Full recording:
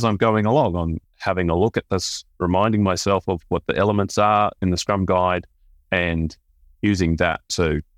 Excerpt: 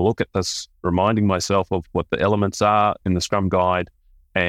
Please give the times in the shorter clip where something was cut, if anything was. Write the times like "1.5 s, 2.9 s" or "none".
none